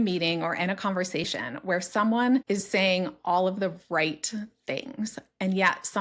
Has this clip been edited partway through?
yes; 1 cut; at 2.4 s

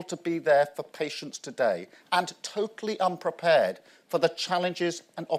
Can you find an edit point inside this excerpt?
no; 0 cuts

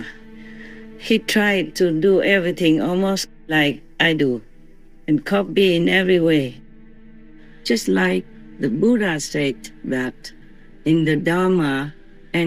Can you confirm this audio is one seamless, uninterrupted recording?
no; 1 cut; at 7.1 s

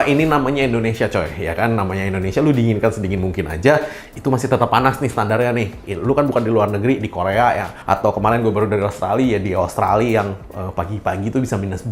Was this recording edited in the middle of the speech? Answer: no; 0 cuts

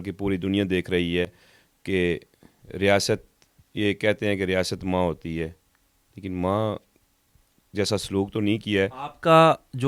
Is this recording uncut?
yes; 0 cuts

